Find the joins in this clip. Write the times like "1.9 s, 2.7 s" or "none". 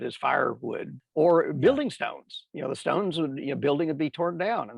1.0 s